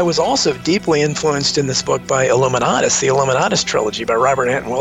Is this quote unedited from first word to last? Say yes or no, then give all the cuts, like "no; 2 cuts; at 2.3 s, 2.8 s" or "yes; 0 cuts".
yes; 0 cuts